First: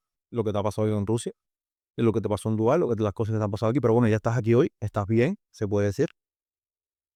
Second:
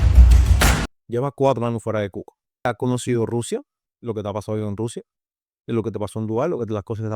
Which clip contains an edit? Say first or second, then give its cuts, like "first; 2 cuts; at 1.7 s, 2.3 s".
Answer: second; 2 cuts; at 0.9 s, 2.7 s